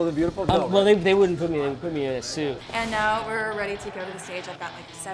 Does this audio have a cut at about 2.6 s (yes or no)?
yes